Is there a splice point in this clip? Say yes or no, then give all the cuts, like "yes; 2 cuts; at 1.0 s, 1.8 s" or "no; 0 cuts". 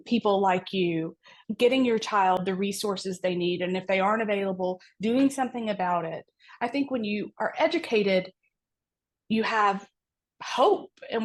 no; 0 cuts